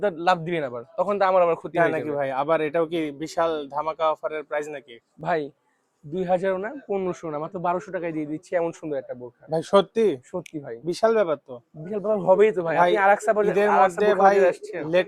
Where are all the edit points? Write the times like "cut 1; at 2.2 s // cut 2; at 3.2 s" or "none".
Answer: none